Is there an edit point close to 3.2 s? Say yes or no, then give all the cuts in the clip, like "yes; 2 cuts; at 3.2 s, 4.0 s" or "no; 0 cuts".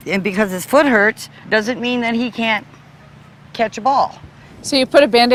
no; 0 cuts